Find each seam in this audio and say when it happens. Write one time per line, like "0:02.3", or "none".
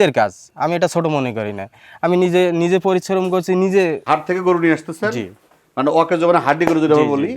0:04.0